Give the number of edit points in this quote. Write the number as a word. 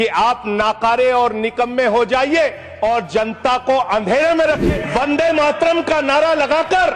one